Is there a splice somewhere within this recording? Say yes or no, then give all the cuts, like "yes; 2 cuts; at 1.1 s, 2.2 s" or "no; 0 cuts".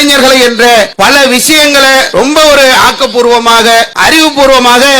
yes; 3 cuts; at 0.9 s, 2.1 s, 3.9 s